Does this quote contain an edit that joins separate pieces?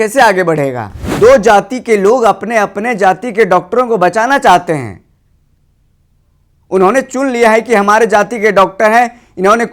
yes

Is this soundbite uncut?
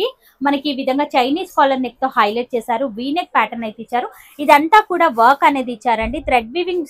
yes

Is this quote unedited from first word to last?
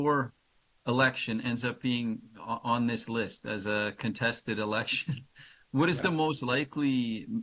yes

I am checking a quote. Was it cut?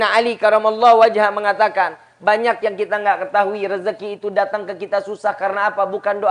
no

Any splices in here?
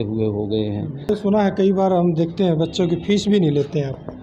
yes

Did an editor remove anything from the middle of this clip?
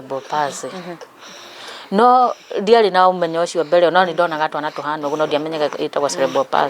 no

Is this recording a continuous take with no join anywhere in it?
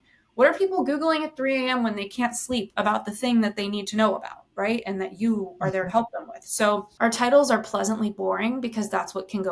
yes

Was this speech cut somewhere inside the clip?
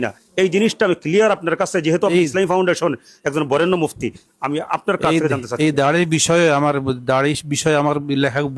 no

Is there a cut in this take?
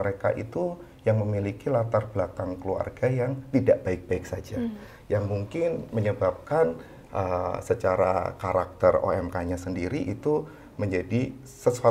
no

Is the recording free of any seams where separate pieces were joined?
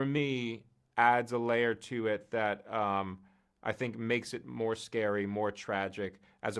yes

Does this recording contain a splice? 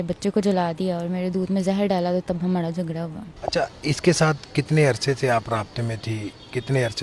yes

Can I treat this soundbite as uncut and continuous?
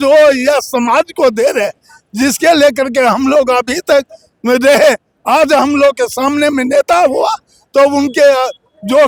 yes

